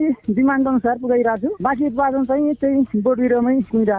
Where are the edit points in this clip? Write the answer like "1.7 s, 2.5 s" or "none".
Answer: none